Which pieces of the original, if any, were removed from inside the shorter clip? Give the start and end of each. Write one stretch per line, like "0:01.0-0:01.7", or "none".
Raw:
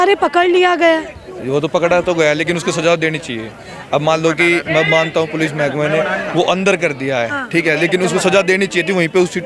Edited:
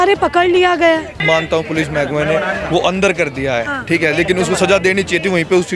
0:01.2-0:04.9